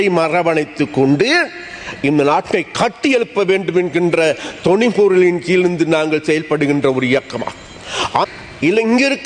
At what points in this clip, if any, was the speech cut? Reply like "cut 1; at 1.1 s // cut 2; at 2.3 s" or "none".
cut 1; at 8.3 s